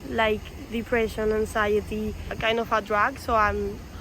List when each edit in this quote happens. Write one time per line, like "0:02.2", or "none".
0:02.4